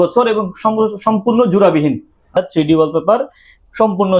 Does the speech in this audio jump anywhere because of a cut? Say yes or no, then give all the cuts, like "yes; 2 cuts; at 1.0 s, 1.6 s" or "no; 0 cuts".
yes; 1 cut; at 2.4 s